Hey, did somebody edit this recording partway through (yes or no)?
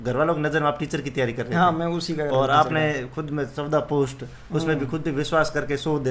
no